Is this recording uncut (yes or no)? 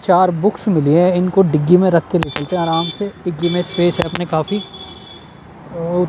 yes